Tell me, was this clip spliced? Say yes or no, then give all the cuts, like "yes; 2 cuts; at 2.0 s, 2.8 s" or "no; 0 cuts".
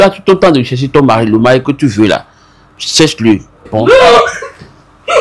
yes; 1 cut; at 3.7 s